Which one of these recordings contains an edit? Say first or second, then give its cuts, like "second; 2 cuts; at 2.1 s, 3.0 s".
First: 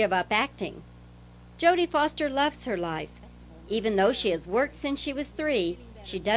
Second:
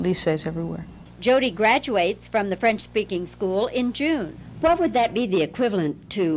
second; 1 cut; at 4.9 s